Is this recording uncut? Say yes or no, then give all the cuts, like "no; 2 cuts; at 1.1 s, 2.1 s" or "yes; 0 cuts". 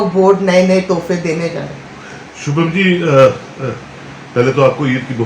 yes; 0 cuts